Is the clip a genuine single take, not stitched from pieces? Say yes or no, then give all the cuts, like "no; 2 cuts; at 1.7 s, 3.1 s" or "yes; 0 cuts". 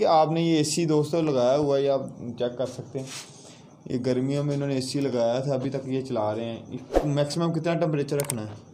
yes; 0 cuts